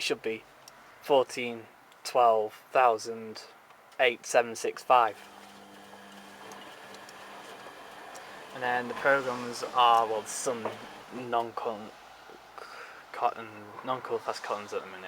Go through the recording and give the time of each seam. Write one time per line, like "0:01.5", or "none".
0:03.8